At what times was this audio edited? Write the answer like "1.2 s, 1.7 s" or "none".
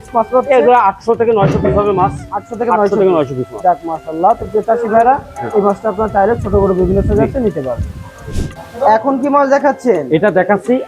none